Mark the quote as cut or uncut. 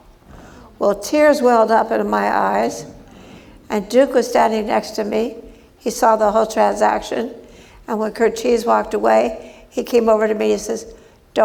uncut